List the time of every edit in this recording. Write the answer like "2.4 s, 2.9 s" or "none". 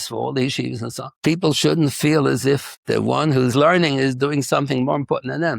1.1 s, 2.7 s